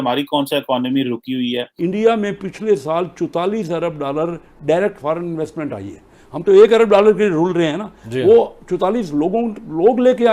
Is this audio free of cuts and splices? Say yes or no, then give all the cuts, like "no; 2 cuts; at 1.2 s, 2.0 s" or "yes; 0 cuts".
no; 1 cut; at 1.7 s